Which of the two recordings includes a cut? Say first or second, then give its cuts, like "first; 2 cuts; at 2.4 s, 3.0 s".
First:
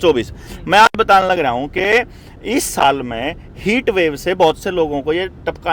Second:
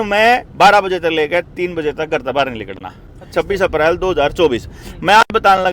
second; 1 cut; at 3.3 s